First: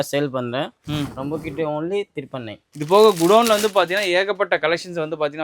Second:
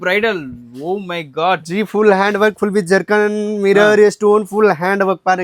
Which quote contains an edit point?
first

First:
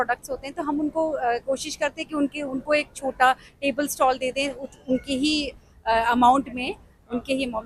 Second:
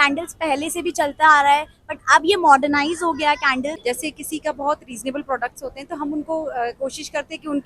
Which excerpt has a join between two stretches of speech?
second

